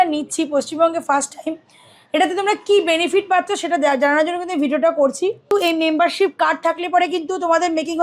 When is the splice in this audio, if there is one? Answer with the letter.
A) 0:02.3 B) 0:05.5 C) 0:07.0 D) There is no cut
B